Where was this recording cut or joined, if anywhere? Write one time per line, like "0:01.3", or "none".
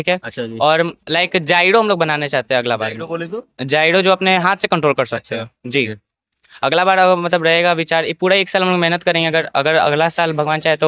none